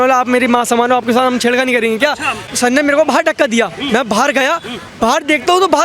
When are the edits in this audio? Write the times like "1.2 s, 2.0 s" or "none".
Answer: 2.4 s